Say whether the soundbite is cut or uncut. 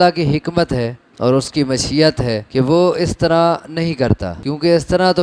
cut